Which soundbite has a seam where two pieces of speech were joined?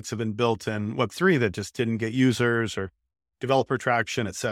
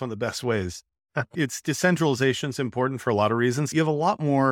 second; 2 cuts; at 1.2 s, 3.7 s

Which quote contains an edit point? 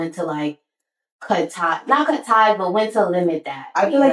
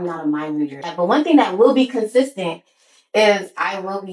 second; 1 cut; at 0.9 s

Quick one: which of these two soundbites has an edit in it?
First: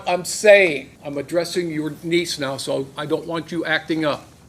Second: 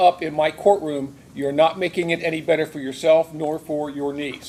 first; 1 cut; at 0.9 s

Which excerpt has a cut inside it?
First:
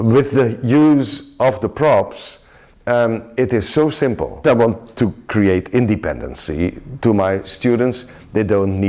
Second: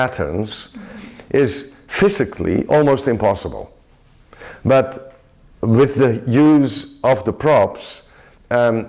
first; 1 cut; at 4.4 s

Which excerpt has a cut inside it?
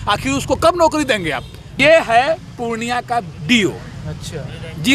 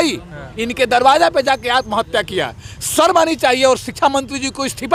first; 1 cut; at 1.8 s

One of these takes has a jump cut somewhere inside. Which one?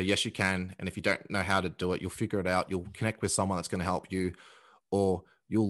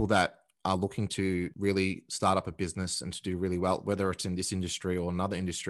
second; 1 cut; at 1.5 s

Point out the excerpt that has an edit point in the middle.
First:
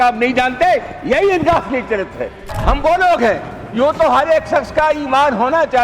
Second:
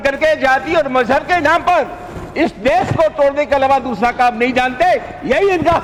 first; 1 cut; at 2.5 s

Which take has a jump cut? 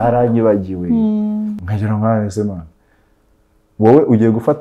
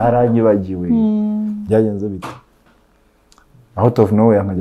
first; 1 cut; at 1.6 s

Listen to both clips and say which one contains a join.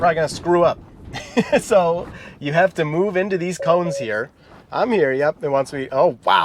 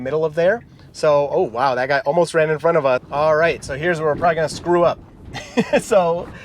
second; 1 cut; at 3.1 s

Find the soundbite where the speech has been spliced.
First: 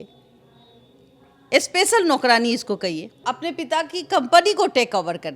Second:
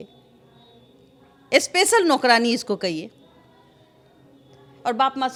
first; 1 cut; at 3.2 s

